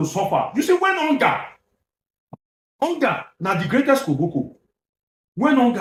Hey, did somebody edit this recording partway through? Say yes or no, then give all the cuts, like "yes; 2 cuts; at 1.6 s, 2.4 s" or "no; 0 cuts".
no; 0 cuts